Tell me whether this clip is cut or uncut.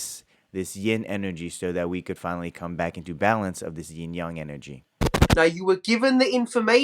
cut